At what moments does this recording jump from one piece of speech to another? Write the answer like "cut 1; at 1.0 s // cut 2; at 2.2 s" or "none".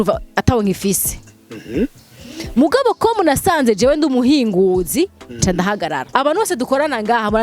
cut 1; at 6.0 s